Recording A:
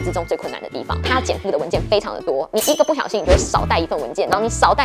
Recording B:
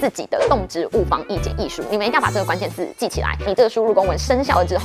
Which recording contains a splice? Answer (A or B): B